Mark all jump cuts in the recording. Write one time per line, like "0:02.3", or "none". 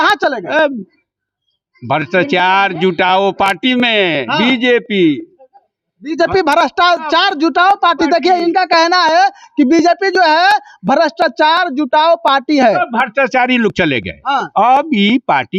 none

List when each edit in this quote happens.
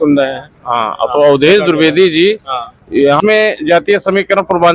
0:03.2

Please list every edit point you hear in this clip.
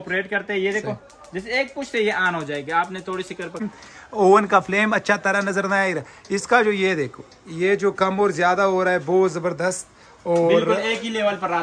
0:03.6

